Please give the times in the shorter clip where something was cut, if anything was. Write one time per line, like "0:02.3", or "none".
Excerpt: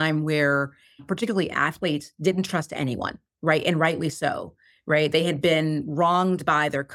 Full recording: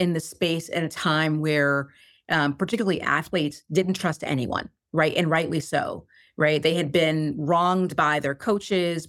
0:01.0

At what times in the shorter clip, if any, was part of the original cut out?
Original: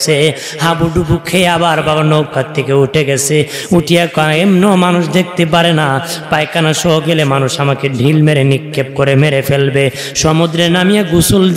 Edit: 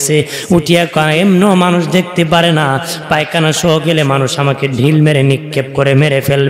none

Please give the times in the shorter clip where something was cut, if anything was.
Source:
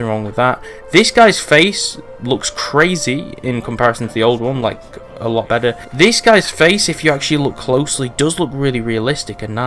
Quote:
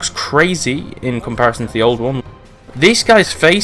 0:02.7

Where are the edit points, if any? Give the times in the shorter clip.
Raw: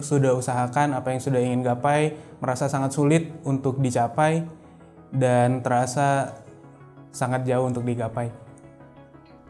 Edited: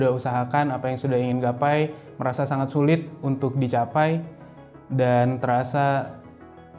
none

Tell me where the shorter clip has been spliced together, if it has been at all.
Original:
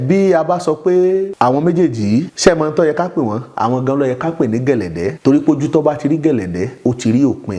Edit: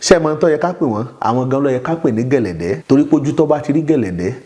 none

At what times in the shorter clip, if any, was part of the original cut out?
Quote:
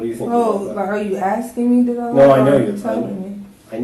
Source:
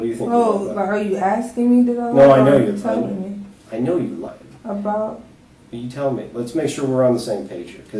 none

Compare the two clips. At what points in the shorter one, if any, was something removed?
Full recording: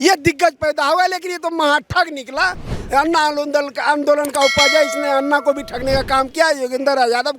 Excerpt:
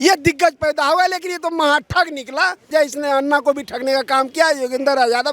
0:02.7

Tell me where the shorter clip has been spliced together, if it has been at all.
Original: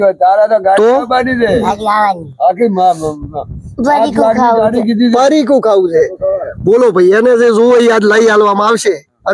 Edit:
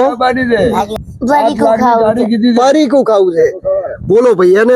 0:00.9

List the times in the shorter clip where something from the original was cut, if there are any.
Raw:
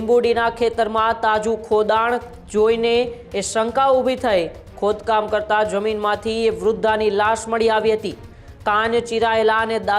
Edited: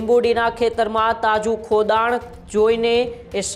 none

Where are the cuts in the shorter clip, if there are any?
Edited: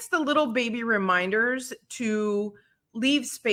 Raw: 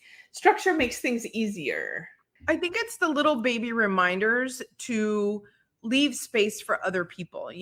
none

